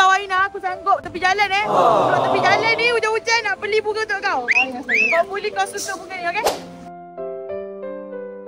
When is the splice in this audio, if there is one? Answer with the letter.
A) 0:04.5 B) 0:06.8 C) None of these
C